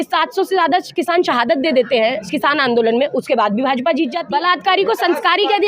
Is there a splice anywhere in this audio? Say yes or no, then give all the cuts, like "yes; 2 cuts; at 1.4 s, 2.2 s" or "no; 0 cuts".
yes; 1 cut; at 4.2 s